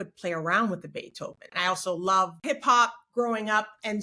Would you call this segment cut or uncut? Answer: cut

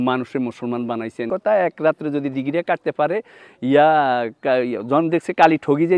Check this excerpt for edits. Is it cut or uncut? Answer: cut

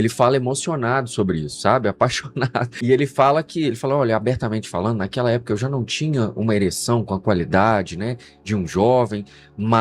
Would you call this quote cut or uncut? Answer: cut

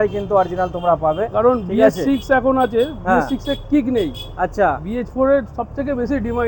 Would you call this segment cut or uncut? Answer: uncut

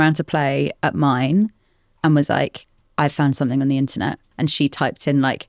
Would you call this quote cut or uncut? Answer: cut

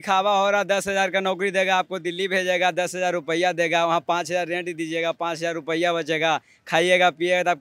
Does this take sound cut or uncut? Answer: uncut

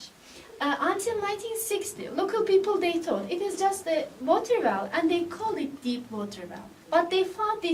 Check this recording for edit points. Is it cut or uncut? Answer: uncut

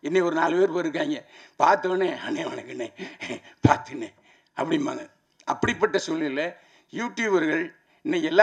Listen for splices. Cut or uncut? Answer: uncut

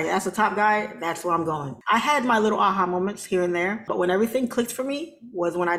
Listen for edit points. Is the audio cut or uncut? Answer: cut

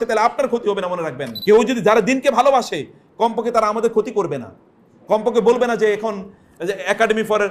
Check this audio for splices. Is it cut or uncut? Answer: cut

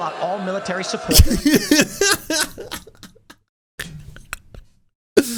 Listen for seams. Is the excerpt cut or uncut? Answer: uncut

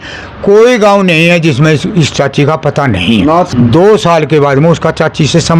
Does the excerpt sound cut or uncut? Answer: cut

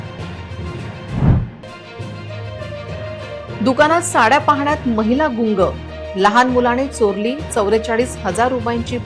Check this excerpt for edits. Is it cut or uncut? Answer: cut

